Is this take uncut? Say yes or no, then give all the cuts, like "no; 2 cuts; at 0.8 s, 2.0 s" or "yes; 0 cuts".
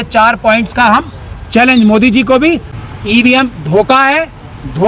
no; 1 cut; at 2.7 s